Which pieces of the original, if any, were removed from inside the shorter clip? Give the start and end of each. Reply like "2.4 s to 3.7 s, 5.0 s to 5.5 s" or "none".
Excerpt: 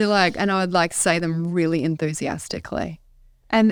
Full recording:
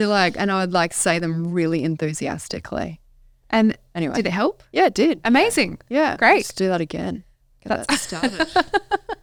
none